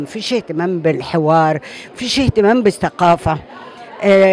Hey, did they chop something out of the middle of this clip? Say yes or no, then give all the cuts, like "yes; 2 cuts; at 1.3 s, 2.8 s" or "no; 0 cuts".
no; 0 cuts